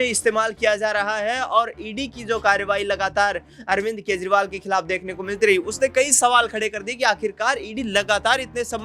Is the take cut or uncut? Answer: uncut